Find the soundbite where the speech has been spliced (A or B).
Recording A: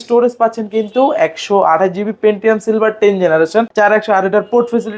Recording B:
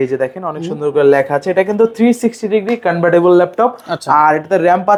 A